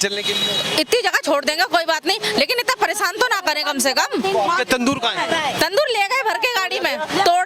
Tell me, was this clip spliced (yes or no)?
no